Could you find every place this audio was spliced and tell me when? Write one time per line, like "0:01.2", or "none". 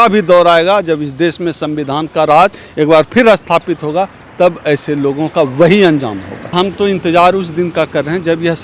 0:06.5